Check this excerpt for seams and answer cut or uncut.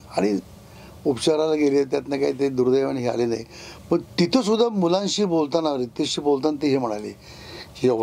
uncut